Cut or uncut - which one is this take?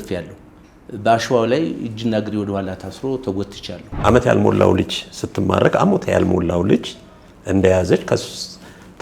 cut